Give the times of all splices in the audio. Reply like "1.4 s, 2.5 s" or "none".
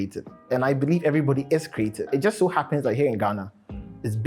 2.1 s

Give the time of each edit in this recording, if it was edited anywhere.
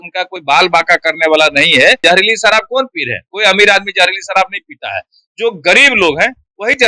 2.0 s

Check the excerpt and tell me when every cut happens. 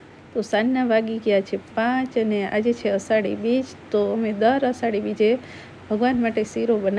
none

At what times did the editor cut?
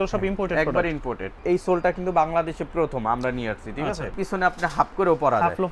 1.3 s, 4.2 s

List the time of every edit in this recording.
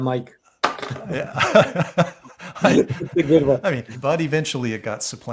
3.9 s

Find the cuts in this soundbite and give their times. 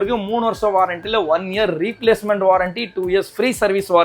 none

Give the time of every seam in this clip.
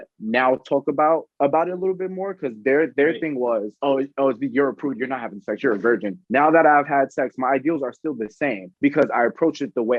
1.3 s

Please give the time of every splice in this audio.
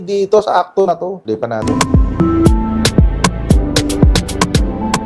1.1 s

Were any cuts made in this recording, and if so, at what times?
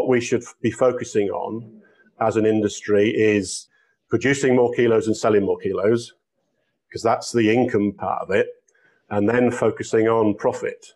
3.6 s, 8.0 s

